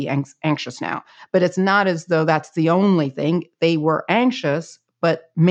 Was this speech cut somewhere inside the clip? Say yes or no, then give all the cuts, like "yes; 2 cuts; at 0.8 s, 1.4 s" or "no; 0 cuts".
no; 0 cuts